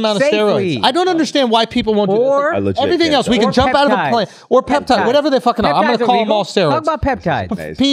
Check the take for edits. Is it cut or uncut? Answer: uncut